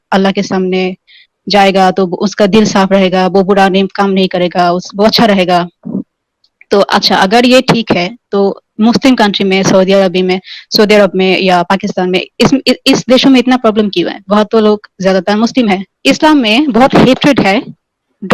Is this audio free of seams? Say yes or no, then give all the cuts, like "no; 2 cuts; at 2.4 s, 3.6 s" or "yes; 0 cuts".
no; 1 cut; at 15.9 s